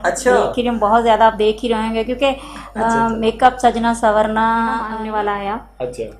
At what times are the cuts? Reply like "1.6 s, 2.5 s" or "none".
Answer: 4.9 s